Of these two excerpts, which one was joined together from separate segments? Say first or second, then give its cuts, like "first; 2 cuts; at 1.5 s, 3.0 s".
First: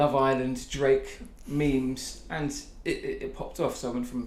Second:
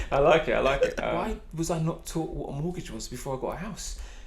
second; 1 cut; at 1.0 s